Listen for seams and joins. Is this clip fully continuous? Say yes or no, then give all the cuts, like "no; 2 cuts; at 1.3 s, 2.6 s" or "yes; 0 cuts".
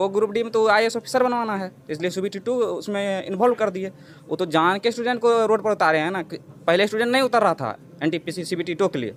yes; 0 cuts